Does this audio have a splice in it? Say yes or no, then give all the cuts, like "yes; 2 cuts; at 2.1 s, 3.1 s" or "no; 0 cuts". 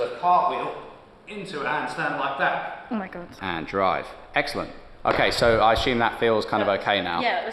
yes; 1 cut; at 3.2 s